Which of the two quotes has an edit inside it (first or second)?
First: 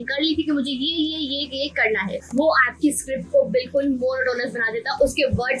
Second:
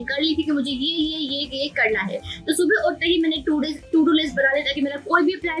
first